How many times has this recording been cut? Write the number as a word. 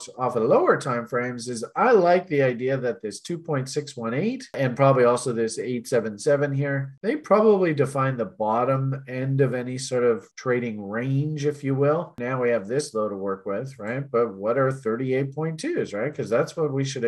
one